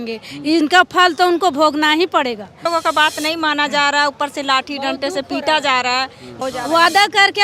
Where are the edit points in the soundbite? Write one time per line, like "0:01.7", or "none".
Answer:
0:02.6
0:06.4

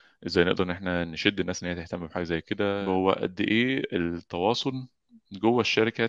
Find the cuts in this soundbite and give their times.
0:02.8

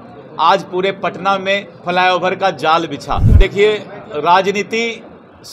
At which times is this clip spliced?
0:03.3

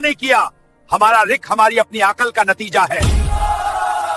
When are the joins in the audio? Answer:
0:02.9

